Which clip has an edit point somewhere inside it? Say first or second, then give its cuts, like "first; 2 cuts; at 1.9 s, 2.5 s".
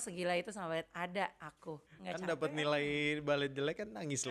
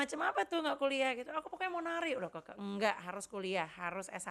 first; 1 cut; at 1.8 s